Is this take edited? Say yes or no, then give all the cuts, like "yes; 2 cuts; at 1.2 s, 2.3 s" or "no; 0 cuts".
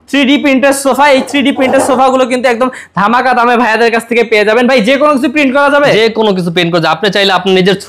no; 0 cuts